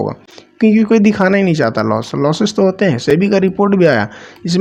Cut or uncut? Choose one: uncut